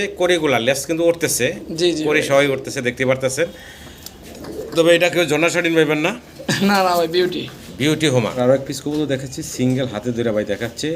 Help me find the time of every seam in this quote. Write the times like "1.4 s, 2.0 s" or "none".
8.3 s